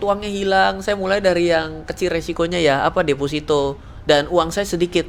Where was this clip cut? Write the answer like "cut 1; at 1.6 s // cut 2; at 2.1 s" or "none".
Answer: none

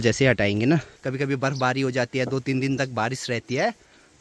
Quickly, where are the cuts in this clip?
cut 1; at 1.0 s

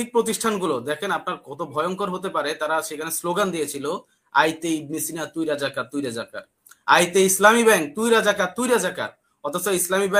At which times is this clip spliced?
none

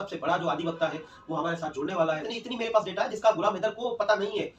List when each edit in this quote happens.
cut 1; at 2.2 s

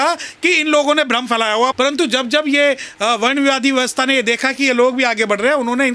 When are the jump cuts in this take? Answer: cut 1; at 1.7 s

